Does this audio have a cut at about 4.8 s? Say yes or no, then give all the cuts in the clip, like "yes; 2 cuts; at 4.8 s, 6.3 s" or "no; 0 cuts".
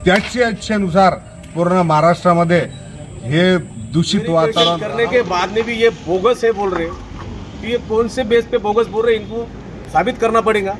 yes; 1 cut; at 4.8 s